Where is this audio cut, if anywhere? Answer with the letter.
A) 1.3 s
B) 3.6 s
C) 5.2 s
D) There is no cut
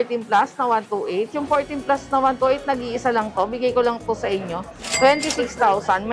D